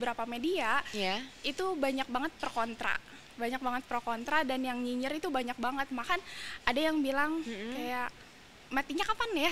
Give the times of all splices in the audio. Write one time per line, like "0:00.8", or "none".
none